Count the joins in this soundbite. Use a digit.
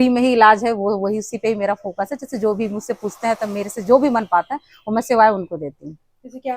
0